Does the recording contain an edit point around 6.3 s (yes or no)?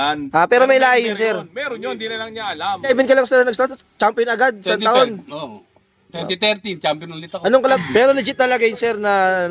no